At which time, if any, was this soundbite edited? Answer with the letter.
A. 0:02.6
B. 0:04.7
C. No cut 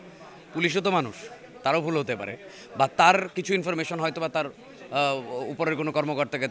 C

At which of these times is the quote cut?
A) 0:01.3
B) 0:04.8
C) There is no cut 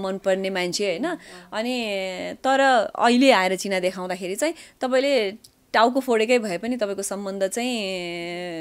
C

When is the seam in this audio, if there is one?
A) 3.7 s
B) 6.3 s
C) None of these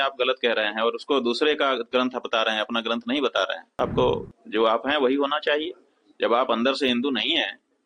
A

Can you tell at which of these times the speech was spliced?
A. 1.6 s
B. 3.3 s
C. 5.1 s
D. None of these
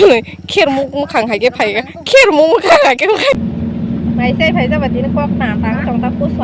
B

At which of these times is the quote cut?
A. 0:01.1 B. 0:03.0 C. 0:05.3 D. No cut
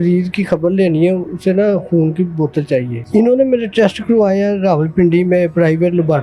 B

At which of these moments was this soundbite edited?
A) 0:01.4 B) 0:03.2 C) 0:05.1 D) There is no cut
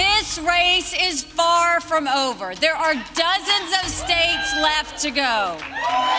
D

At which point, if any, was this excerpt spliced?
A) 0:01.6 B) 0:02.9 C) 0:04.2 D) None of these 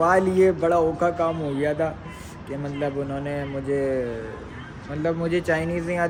D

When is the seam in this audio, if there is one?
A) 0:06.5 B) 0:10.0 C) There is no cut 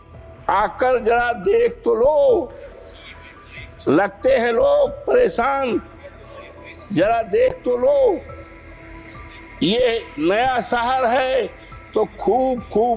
C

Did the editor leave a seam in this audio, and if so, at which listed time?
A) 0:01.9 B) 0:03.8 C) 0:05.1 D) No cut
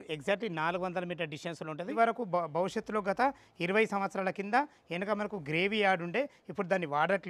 A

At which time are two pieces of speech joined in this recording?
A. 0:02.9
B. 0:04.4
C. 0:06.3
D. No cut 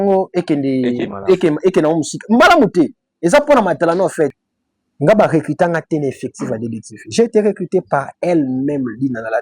B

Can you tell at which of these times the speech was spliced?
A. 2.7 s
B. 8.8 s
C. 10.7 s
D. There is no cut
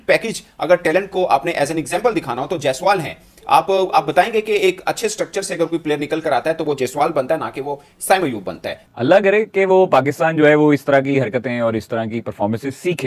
B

